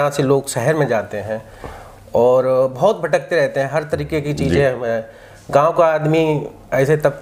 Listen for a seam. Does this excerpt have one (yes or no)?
no